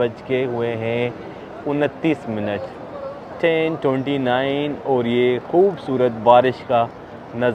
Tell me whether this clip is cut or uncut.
uncut